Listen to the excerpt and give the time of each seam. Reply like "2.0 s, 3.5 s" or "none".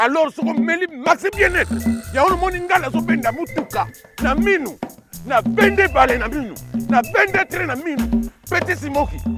none